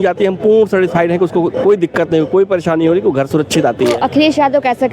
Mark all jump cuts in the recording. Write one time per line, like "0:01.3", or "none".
0:04.0